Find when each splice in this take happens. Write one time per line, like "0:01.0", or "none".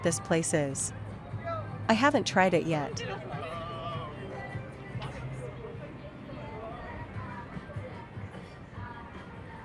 none